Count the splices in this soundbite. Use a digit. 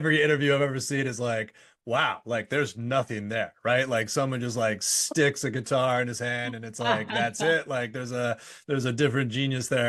0